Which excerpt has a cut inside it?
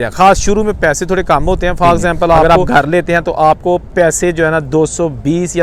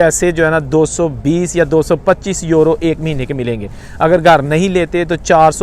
first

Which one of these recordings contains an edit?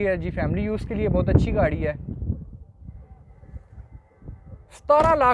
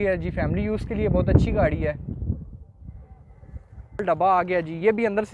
second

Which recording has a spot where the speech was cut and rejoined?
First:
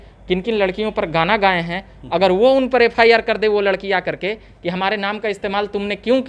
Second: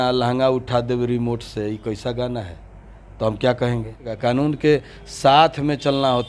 second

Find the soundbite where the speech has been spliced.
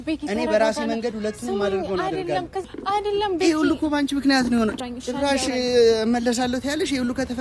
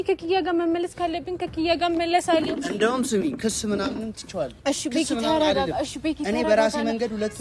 first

